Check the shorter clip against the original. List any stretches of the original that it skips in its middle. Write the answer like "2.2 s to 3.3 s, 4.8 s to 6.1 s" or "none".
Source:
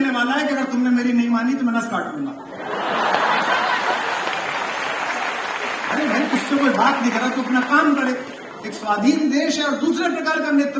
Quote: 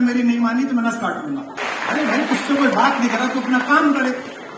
2.5 s to 5.6 s